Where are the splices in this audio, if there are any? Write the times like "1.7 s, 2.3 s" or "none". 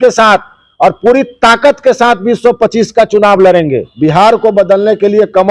3.8 s